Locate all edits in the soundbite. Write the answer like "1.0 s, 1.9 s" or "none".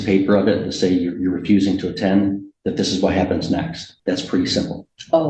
3.8 s